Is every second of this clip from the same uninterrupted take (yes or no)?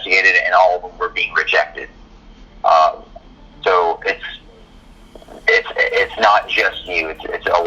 yes